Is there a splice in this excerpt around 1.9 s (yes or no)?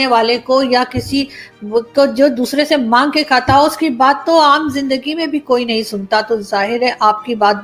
no